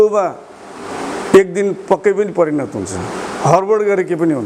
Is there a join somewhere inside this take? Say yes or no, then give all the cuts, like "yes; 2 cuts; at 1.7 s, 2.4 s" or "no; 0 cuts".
no; 0 cuts